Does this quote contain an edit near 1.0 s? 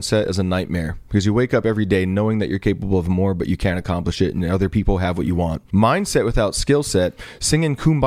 no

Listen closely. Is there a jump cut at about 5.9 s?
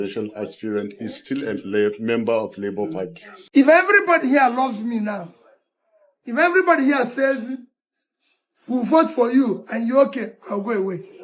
no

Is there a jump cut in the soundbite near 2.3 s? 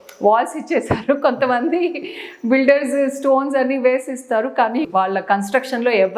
no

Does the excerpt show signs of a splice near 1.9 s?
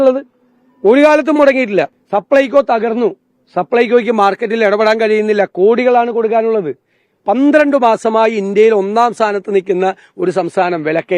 yes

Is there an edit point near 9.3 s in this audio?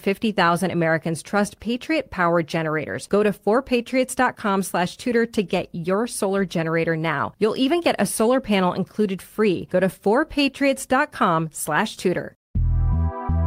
no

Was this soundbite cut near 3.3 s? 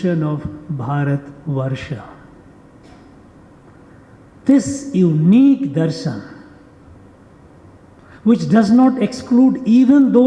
yes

